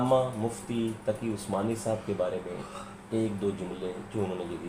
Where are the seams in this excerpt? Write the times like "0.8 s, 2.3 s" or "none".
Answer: none